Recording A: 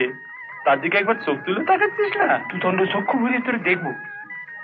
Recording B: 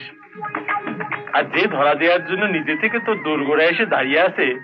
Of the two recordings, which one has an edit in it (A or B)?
A